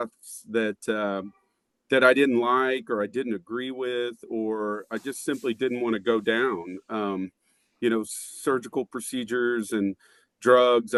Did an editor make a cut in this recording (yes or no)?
no